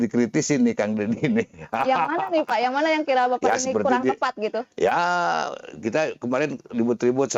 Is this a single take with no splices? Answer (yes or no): yes